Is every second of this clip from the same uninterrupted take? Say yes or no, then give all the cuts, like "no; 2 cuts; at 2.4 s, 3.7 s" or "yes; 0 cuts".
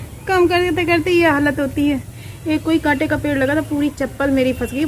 yes; 0 cuts